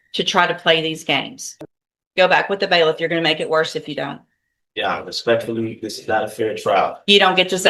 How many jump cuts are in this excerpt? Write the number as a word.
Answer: one